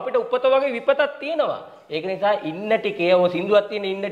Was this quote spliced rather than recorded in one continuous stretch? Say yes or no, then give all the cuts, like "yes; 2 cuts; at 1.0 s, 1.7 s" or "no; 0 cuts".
no; 0 cuts